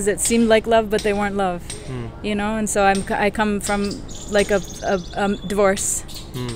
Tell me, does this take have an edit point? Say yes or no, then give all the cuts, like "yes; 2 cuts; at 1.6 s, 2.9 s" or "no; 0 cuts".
no; 0 cuts